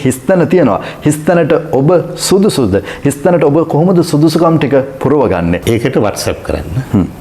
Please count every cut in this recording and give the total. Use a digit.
1